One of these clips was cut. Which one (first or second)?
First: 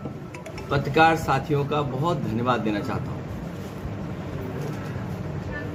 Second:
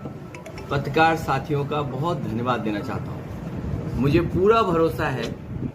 second